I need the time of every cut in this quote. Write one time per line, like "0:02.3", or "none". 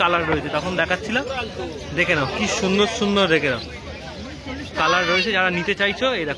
none